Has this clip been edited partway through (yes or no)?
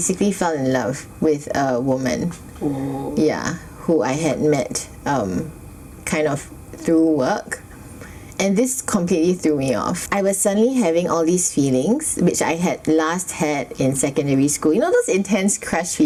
no